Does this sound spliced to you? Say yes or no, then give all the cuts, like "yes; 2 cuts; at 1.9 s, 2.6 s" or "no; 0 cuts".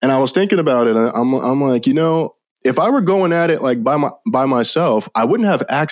no; 0 cuts